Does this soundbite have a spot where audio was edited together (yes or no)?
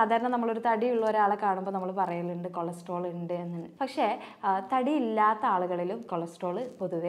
yes